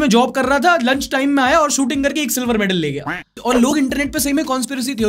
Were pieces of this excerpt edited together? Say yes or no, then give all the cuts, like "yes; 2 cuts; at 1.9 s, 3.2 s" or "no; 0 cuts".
no; 0 cuts